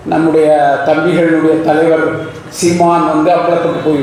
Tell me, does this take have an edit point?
no; 0 cuts

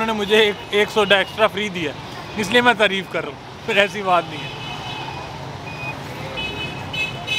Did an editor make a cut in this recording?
no; 0 cuts

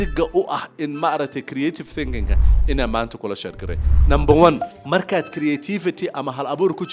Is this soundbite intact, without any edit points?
yes; 0 cuts

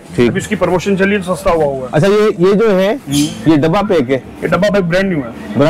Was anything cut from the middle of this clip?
no; 0 cuts

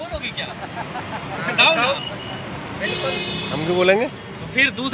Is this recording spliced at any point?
no; 0 cuts

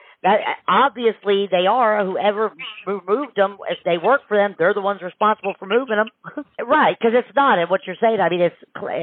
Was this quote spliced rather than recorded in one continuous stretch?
yes; 1 cut; at 6.6 s

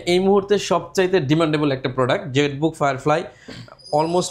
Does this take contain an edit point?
no; 0 cuts

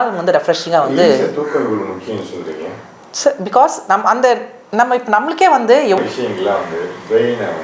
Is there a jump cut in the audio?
yes; 1 cut; at 6.0 s

